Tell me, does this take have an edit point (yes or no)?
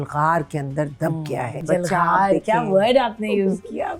yes